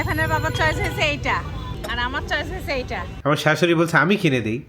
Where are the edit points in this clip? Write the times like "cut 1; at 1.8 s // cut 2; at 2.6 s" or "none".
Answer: cut 1; at 1.7 s // cut 2; at 3.1 s